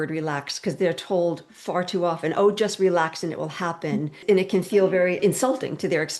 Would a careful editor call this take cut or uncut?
cut